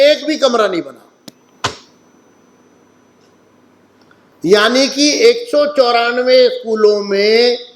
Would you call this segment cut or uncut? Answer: uncut